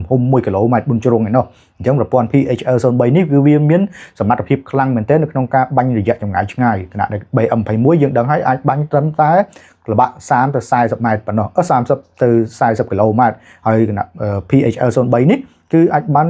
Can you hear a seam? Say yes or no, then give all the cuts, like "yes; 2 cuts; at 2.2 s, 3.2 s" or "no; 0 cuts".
no; 0 cuts